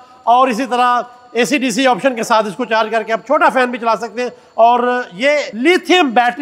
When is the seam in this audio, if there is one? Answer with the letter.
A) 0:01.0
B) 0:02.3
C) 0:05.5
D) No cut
C